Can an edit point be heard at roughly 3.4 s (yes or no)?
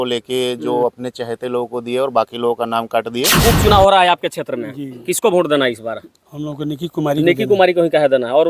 yes